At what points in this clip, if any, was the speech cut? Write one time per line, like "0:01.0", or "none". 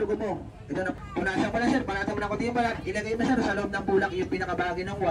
0:00.9